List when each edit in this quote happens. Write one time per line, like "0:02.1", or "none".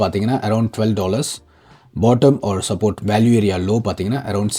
none